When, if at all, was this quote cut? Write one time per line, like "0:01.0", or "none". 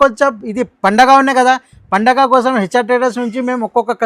none